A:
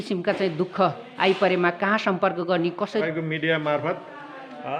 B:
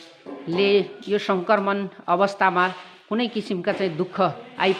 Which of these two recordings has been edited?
A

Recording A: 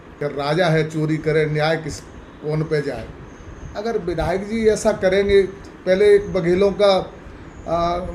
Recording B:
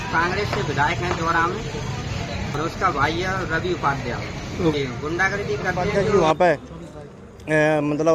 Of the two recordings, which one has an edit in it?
B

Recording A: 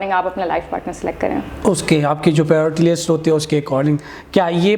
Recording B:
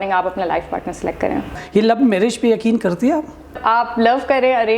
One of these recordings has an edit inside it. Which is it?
B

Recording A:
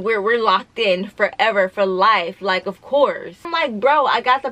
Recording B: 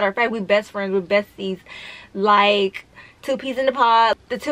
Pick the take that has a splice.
A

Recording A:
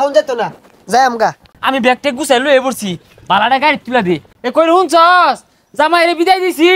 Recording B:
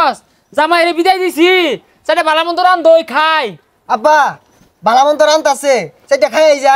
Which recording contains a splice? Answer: A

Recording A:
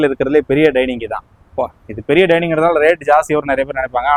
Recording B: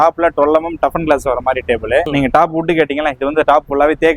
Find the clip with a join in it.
B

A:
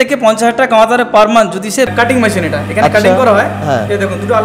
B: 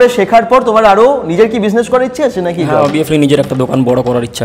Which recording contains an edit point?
A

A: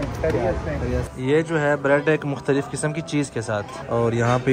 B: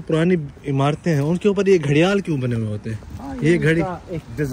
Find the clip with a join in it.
A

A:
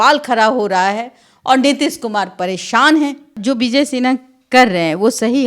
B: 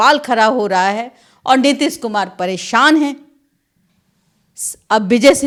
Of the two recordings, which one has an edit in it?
A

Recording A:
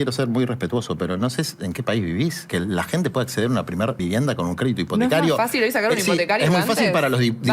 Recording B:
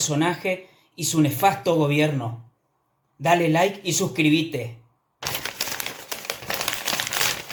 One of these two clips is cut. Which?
A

